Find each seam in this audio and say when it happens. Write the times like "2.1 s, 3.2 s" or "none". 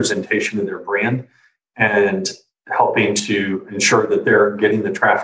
3.7 s